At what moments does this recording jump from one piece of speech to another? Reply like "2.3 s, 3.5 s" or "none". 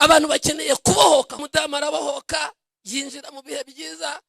1.4 s

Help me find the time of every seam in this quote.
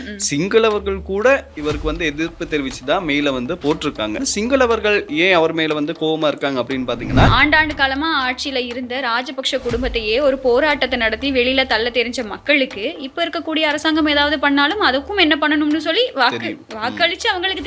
4.3 s, 7.3 s

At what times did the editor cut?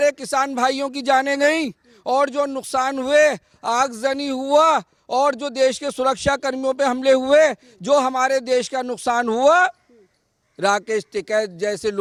none

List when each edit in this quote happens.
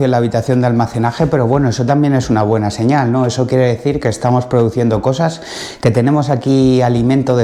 none

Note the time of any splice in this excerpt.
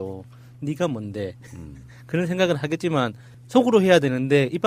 none

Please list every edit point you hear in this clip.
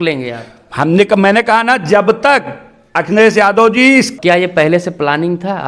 4.1 s

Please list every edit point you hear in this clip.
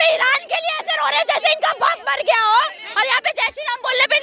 2.8 s

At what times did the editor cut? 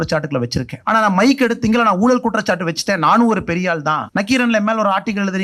4.1 s

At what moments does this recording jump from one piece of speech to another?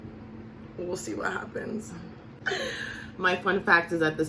2.3 s

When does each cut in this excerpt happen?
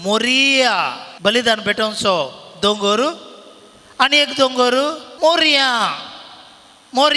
1.0 s, 5.0 s

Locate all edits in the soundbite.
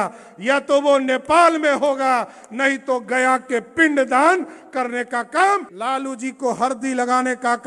5.7 s

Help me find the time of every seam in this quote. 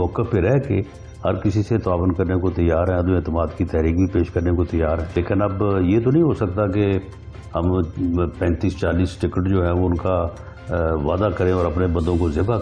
5.2 s

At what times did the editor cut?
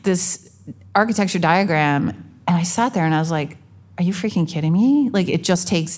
none

